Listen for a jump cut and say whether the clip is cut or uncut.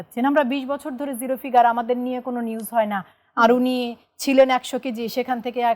uncut